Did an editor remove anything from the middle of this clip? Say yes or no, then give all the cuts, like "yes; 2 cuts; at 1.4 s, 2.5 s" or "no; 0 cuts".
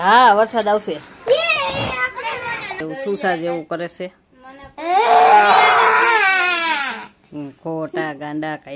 yes; 1 cut; at 2.8 s